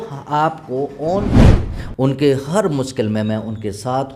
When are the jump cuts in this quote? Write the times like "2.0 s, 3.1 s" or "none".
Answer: 1.3 s

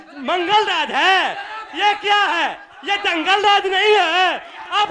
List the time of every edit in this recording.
none

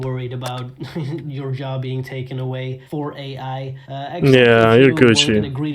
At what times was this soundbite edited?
none

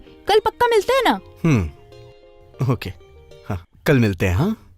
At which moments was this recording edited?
3.7 s

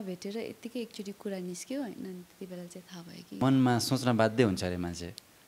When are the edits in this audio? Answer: 3.4 s

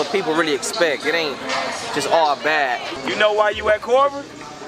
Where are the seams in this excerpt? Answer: 2.9 s

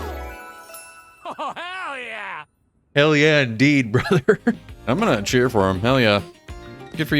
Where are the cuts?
4.7 s

